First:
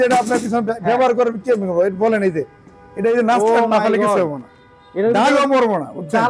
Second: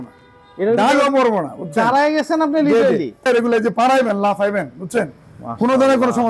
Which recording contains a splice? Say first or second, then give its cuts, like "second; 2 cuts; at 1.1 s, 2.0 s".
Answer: second; 1 cut; at 3.2 s